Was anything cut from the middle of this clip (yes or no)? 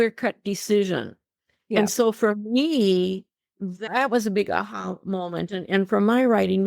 yes